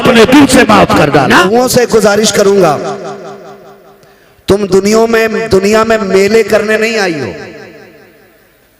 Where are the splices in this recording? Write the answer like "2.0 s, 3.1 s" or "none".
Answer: 1.4 s